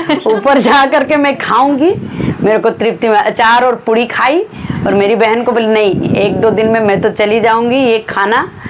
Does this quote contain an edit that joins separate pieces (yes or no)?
no